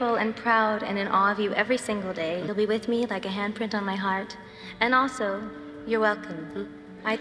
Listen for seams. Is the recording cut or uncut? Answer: cut